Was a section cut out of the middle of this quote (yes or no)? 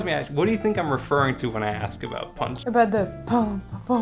yes